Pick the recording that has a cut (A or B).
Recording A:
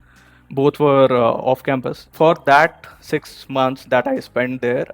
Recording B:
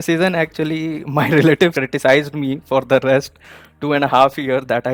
A